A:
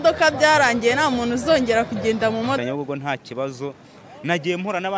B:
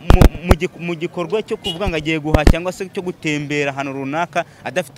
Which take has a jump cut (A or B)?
A